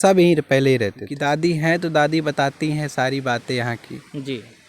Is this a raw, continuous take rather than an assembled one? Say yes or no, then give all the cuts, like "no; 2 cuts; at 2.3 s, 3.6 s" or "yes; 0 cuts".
no; 1 cut; at 1.1 s